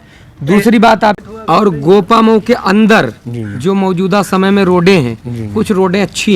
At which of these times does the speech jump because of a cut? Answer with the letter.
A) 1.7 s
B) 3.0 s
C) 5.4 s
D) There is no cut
A